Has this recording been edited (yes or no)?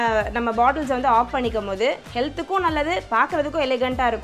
no